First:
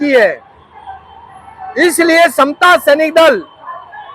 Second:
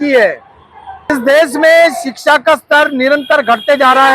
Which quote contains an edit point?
second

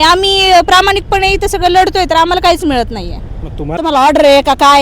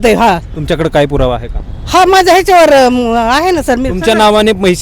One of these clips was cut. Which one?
first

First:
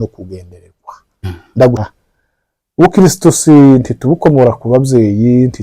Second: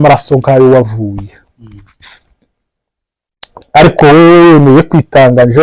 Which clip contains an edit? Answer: first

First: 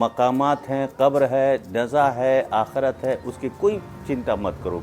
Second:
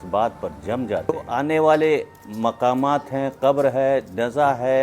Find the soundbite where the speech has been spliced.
second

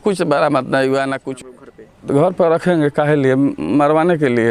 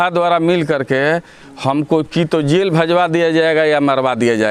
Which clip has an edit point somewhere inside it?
first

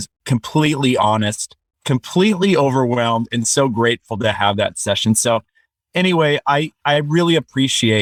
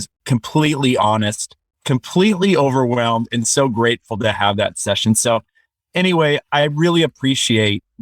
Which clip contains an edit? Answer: second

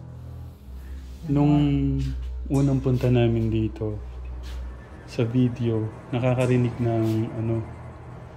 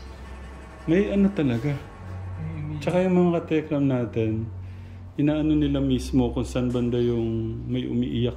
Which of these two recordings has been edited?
first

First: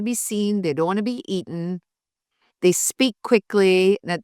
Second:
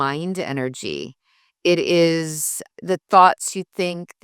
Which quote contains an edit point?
second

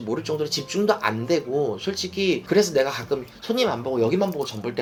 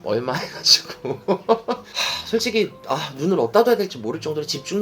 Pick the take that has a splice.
second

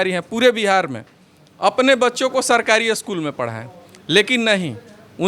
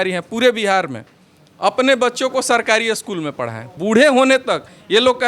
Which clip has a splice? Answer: second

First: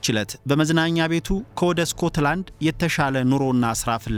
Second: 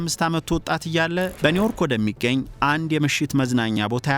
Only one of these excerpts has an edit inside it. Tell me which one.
second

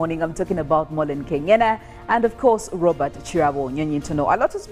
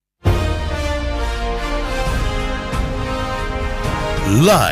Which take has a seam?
first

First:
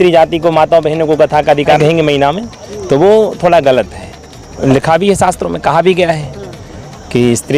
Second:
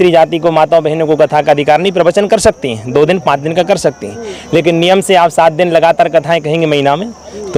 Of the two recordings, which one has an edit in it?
first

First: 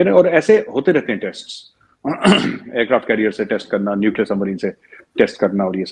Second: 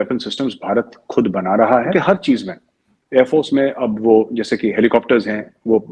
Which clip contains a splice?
second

